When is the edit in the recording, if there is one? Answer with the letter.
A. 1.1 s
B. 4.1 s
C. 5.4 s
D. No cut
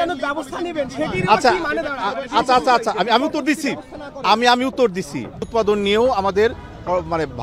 C